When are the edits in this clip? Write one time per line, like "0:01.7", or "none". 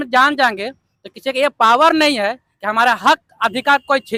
none